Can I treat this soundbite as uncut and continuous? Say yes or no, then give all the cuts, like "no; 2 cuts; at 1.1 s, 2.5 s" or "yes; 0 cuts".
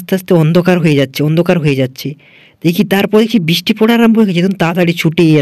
yes; 0 cuts